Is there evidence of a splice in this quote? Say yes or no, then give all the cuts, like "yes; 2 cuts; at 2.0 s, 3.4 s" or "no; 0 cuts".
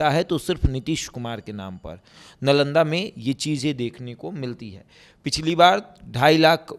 no; 0 cuts